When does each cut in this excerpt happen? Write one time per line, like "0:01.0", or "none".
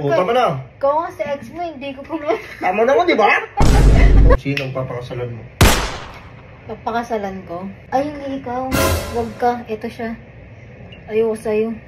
0:04.4
0:07.8